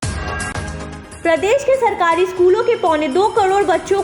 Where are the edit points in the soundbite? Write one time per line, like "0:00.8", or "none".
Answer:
0:01.0